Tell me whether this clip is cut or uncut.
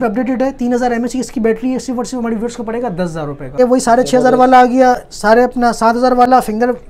cut